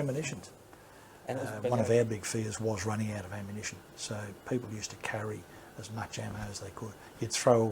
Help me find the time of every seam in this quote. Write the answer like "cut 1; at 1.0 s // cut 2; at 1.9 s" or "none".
cut 1; at 1.6 s